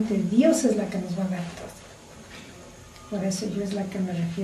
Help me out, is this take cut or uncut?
cut